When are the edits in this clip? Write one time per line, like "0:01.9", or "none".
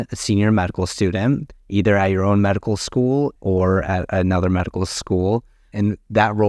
0:01.6
0:03.4